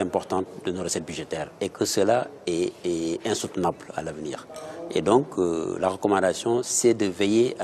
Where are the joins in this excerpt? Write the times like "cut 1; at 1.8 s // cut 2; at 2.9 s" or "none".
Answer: none